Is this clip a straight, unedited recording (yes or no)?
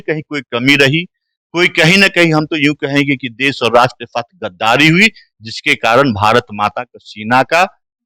yes